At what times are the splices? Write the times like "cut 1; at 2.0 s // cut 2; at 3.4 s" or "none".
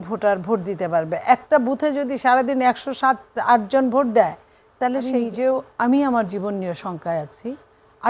cut 1; at 5.1 s